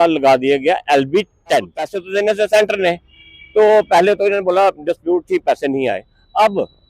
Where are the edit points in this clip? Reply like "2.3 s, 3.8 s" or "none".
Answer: 2.0 s